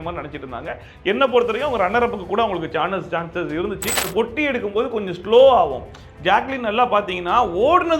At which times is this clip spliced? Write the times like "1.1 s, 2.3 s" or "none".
4.1 s